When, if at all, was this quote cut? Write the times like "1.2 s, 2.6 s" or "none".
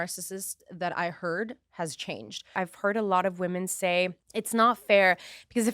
2.5 s, 4.2 s